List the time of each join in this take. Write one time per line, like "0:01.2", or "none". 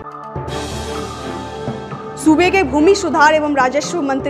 0:01.5